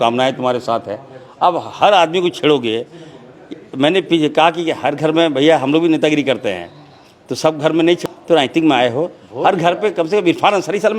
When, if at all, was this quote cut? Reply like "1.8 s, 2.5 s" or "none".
8.0 s